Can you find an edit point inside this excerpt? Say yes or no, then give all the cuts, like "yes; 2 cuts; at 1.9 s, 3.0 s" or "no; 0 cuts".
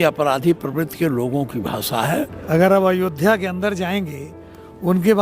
yes; 1 cut; at 2.4 s